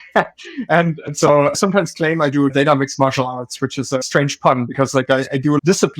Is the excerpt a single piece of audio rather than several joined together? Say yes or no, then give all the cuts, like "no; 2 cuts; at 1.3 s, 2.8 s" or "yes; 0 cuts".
no; 3 cuts; at 1.5 s, 2.5 s, 3.9 s